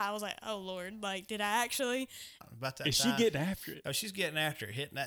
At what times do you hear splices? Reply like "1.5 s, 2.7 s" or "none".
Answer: 2.5 s